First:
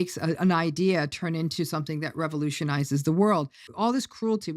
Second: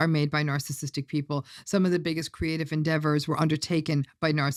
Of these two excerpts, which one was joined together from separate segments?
first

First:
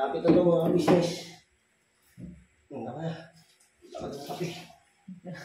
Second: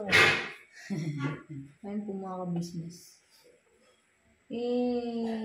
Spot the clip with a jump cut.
second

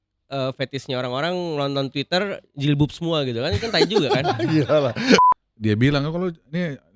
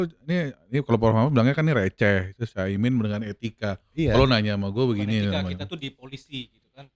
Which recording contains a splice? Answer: first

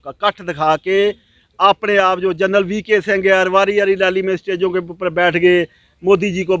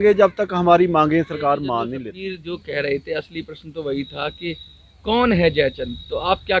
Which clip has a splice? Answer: second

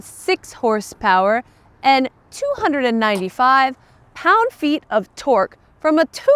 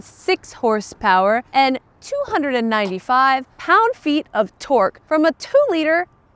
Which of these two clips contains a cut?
second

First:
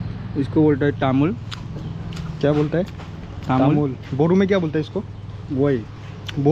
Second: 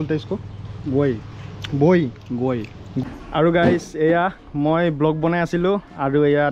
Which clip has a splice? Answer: second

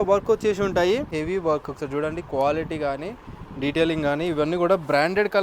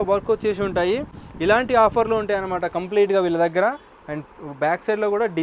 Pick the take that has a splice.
first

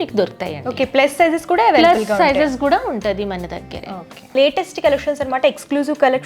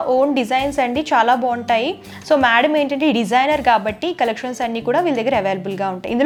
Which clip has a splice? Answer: first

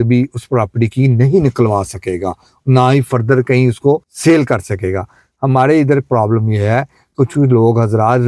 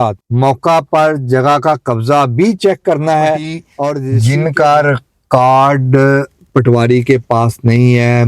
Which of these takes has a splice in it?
second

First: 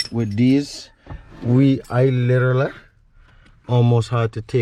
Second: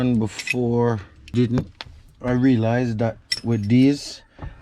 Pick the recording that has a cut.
second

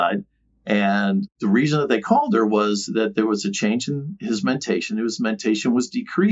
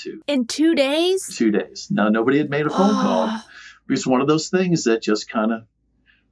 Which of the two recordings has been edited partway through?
first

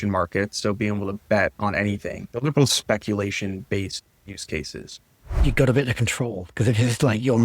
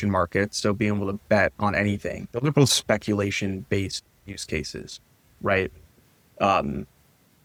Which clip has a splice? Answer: first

